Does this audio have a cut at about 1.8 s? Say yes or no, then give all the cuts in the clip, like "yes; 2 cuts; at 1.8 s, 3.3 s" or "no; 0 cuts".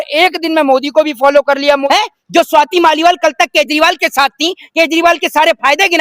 yes; 1 cut; at 1.8 s